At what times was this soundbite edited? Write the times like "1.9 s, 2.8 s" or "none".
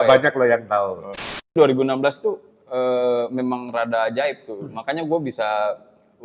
1.5 s